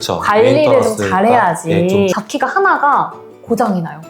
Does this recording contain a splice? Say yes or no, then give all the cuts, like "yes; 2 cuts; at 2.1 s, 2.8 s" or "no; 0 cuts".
yes; 1 cut; at 2.1 s